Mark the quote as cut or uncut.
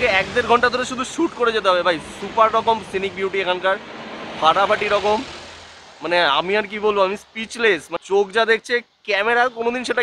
uncut